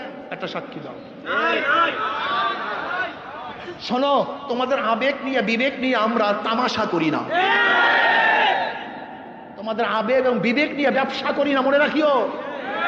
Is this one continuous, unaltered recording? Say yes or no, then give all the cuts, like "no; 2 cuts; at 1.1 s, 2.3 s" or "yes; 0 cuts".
yes; 0 cuts